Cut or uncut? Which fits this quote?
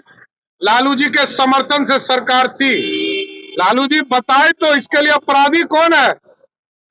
uncut